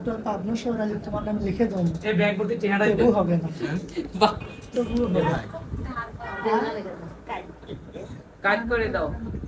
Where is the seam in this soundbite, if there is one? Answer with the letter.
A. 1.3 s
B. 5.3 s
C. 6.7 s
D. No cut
B